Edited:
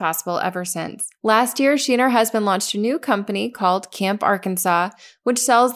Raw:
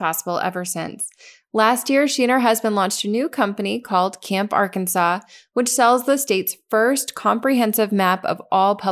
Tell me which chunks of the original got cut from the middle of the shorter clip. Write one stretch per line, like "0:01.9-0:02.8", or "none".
0:01.0-0:01.3